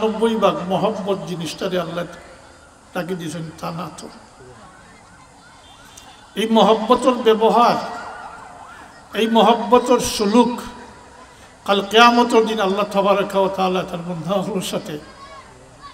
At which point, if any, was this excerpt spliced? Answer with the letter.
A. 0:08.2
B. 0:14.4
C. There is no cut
C